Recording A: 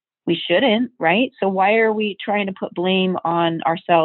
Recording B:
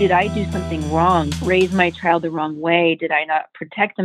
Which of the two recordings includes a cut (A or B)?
B